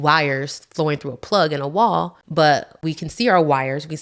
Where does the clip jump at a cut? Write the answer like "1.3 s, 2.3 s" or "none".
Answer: 2.2 s, 2.8 s